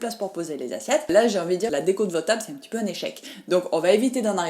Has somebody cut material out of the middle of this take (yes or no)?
yes